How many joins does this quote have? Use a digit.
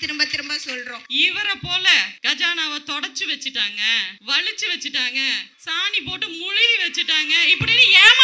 4